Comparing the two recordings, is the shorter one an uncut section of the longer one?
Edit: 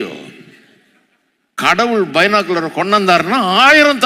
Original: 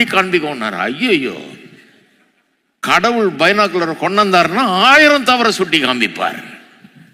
yes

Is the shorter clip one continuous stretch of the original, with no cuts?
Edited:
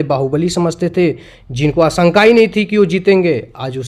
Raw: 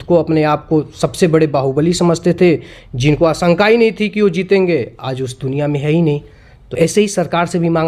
yes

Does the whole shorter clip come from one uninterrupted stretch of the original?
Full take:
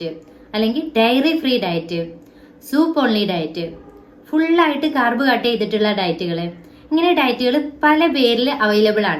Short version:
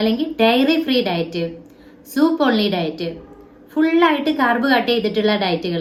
yes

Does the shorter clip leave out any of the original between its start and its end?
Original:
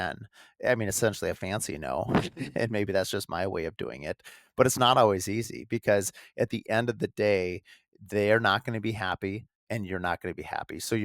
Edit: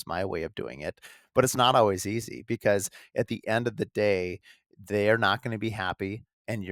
no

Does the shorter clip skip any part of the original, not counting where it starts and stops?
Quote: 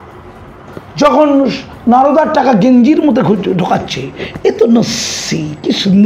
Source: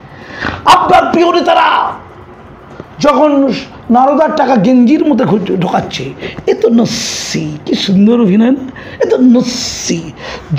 no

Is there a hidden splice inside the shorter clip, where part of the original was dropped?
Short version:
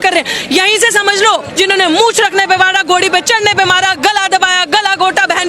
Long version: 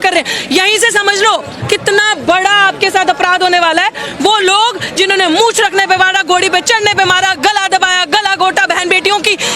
yes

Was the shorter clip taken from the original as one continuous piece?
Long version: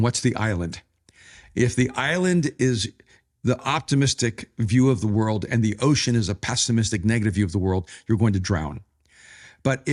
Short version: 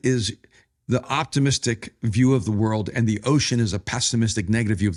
yes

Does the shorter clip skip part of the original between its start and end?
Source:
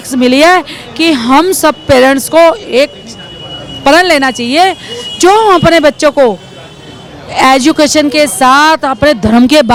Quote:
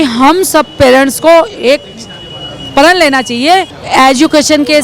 yes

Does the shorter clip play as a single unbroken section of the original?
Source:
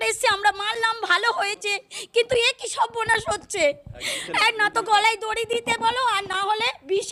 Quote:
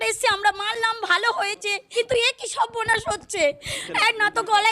no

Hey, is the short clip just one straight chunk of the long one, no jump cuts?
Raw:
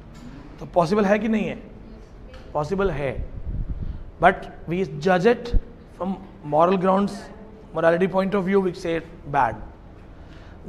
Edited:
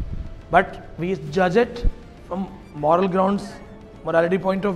yes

